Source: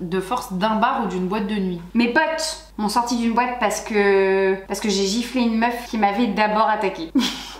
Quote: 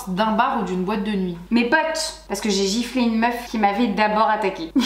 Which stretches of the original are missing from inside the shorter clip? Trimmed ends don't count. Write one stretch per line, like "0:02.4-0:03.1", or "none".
0:02.7-0:04.7